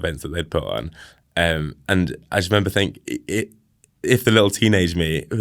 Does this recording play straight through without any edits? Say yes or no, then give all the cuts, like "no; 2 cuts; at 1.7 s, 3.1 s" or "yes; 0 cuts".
yes; 0 cuts